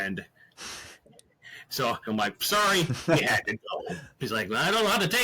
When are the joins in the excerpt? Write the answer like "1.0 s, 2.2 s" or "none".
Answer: 2.0 s, 4.1 s